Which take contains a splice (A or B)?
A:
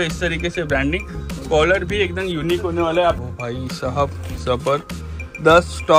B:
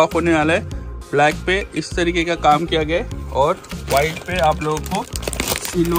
A